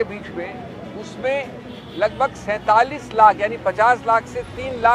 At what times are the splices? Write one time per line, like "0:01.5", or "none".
none